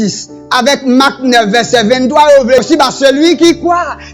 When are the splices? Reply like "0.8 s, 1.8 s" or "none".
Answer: 2.6 s